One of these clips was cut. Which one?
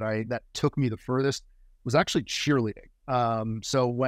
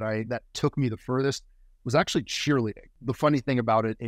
second; 1 cut; at 2.9 s

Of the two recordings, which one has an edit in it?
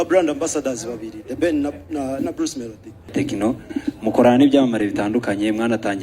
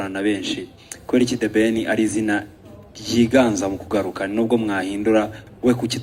first; 1 cut; at 3.1 s

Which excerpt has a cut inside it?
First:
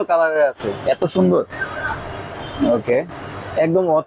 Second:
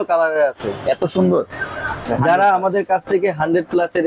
second; 1 cut; at 2.0 s

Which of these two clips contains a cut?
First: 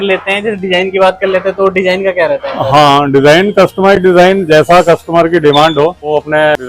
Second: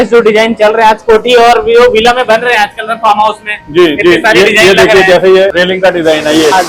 second; 1 cut; at 5.5 s

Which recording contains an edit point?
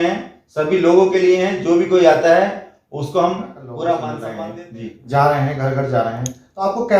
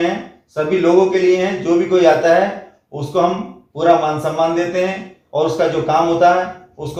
first; 1 cut; at 4.2 s

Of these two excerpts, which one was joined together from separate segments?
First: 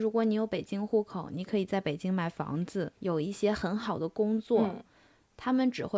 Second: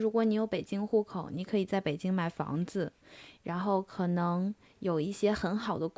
first; 1 cut; at 2.9 s

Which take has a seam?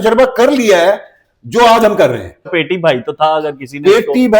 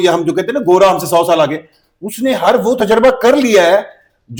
first; 1 cut; at 2.5 s

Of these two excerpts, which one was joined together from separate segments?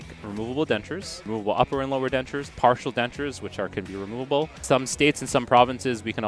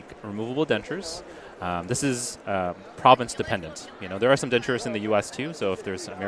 first; 2 cuts; at 1.2 s, 4.6 s

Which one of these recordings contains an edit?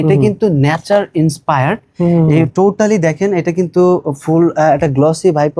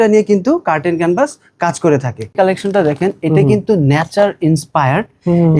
second; 1 cut; at 2.3 s

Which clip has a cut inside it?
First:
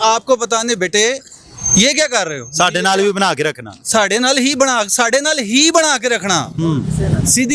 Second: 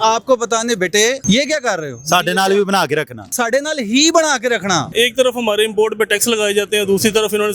second; 3 cuts; at 1.2 s, 3.3 s, 4.9 s

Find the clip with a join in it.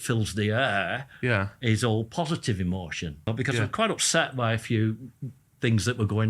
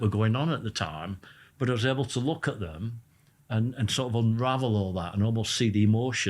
first; 1 cut; at 3.3 s

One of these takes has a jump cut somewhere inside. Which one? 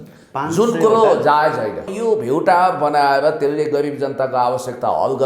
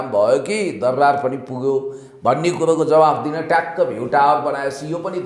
first; 1 cut; at 1.9 s

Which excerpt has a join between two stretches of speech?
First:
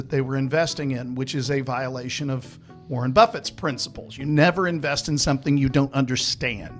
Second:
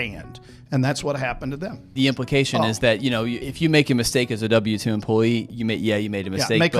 second; 3 cuts; at 1.8 s, 3.4 s, 5.5 s

